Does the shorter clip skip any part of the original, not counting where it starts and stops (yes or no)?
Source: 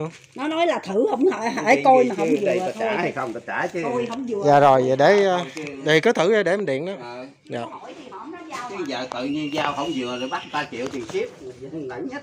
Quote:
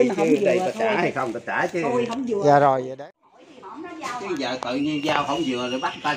yes